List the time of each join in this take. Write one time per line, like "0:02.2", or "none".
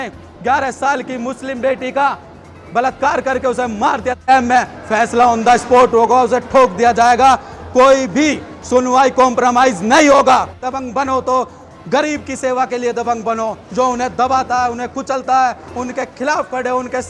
0:04.2
0:10.7